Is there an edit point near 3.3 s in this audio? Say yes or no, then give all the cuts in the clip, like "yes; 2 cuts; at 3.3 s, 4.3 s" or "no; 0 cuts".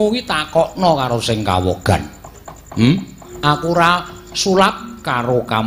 yes; 1 cut; at 3.3 s